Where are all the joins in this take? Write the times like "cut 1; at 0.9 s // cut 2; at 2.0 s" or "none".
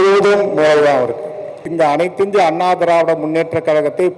cut 1; at 1.6 s